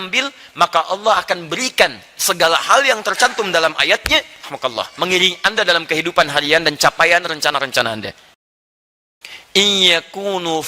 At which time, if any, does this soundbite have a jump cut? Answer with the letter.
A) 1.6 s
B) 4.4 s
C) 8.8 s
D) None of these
C